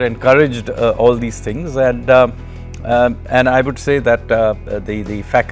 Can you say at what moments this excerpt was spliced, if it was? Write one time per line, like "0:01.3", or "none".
none